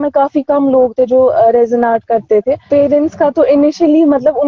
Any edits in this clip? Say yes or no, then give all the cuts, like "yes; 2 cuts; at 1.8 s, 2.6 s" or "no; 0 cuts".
yes; 1 cut; at 2.7 s